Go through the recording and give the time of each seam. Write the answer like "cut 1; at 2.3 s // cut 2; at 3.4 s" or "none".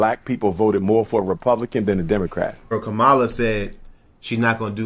cut 1; at 2.7 s

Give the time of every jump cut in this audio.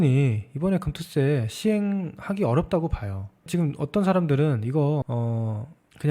cut 1; at 5.1 s

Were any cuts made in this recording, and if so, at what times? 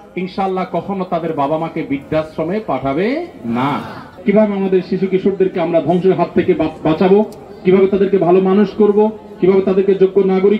cut 1; at 4.0 s

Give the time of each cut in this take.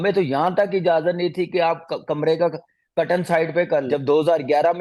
cut 1; at 3.9 s

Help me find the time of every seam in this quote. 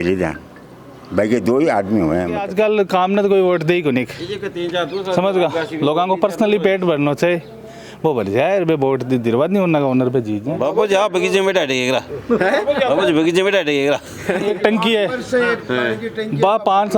cut 1; at 2.4 s // cut 2; at 10.5 s // cut 3; at 14.4 s

